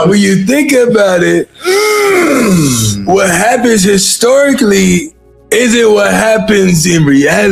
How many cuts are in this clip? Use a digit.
0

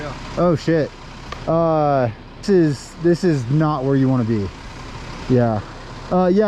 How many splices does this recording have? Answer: 1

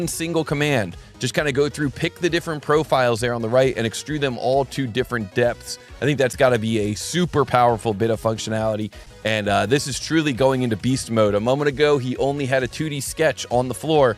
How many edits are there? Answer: 1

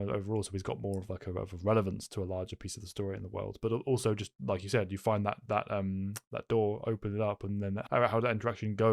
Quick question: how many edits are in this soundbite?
1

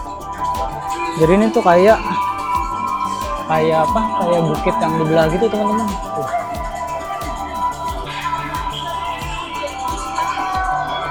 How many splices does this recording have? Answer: 0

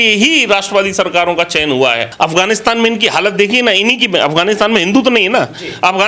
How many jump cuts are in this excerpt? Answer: 1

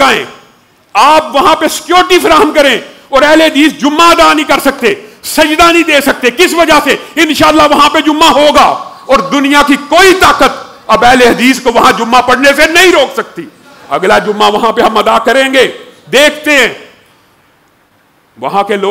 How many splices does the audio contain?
0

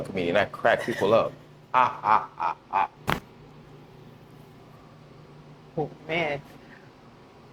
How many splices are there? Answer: 1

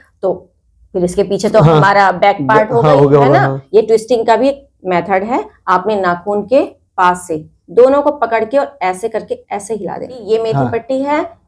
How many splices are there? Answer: 2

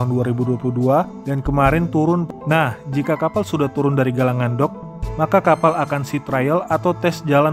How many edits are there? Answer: 1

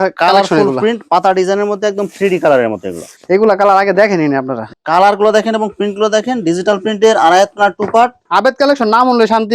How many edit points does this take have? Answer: 2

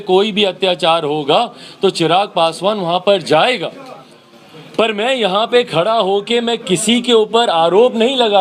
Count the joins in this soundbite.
0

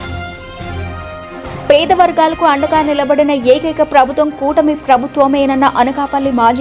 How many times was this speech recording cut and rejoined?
1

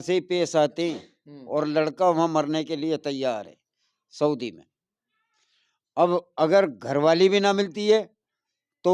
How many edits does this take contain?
0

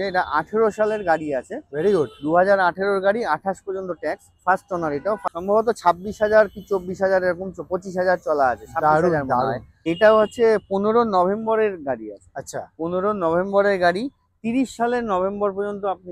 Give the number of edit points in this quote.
2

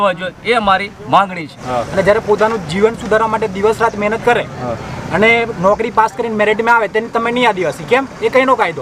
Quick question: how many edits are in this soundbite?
1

